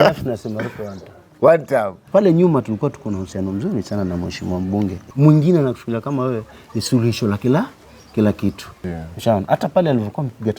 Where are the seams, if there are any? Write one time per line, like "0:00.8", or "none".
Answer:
0:02.0
0:05.1
0:08.7